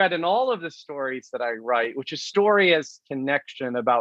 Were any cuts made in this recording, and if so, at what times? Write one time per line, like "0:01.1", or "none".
none

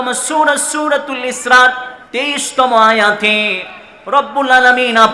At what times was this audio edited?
0:01.9

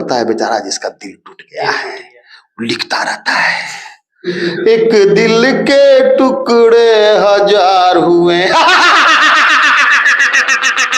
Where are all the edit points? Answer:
none

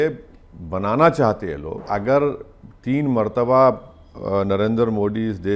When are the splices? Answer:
0:01.9

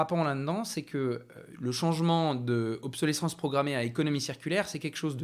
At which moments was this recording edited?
none

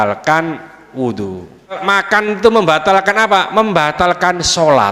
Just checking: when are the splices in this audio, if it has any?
0:01.8

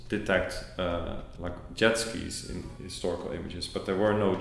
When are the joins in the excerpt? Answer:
none

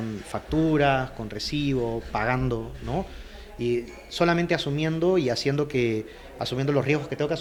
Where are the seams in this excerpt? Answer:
none

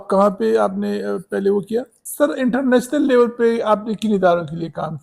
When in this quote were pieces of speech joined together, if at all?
0:02.0

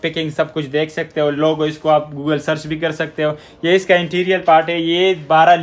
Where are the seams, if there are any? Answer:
none

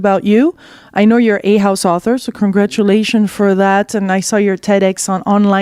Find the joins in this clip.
none

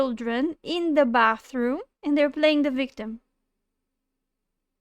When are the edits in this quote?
0:01.9

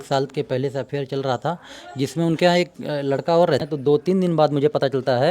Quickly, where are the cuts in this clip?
0:03.6

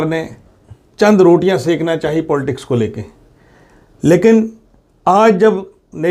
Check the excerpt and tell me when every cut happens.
none

